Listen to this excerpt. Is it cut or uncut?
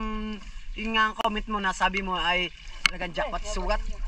uncut